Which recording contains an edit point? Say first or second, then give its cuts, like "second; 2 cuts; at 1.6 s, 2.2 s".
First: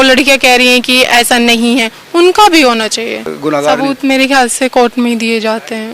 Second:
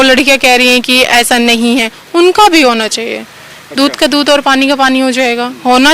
first; 1 cut; at 3.3 s